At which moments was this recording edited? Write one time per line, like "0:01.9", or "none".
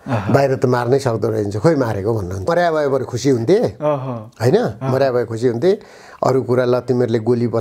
0:02.5